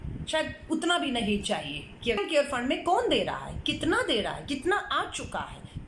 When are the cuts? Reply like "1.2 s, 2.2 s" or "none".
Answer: 2.2 s